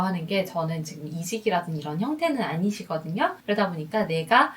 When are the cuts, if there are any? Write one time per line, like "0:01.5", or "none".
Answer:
0:03.4